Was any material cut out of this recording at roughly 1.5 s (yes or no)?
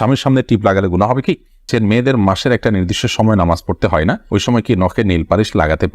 yes